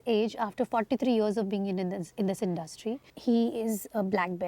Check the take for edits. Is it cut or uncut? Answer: cut